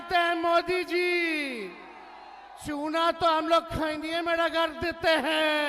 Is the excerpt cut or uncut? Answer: uncut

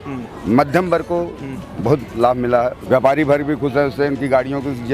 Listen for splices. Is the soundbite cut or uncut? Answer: cut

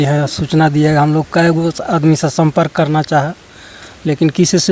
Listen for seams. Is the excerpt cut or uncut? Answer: uncut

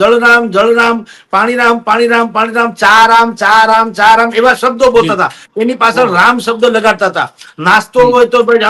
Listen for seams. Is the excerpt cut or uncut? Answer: uncut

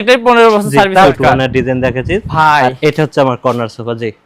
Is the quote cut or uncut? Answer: cut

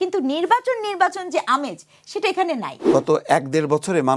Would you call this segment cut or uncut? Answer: cut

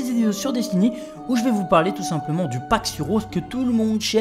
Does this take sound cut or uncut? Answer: uncut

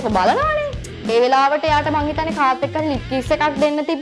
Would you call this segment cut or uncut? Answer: cut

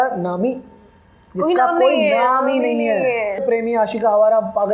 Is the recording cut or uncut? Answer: cut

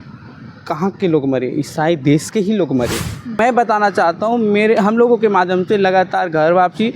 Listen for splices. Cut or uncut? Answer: cut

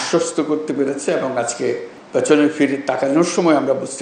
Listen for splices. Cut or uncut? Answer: cut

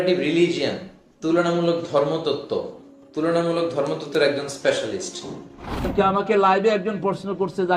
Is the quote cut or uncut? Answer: cut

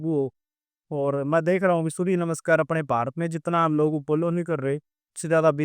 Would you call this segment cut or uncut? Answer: uncut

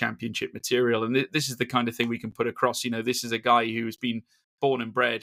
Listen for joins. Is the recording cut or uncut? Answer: uncut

